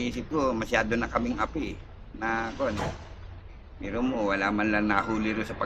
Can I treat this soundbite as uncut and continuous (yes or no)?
yes